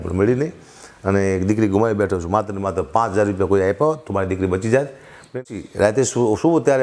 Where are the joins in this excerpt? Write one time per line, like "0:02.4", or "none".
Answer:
0:05.3